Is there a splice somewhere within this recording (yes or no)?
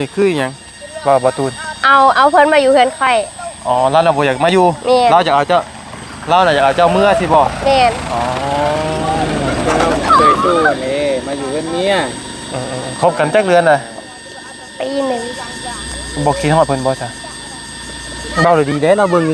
no